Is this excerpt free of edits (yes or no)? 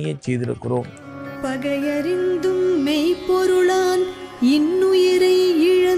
no